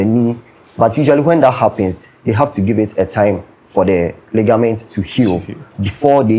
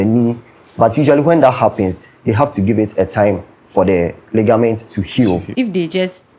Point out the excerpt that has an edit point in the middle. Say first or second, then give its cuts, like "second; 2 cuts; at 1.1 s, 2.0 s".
second; 1 cut; at 5.5 s